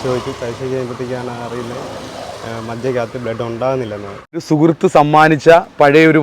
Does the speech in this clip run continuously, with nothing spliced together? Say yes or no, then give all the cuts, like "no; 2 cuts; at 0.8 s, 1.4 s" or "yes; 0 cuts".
no; 1 cut; at 4.5 s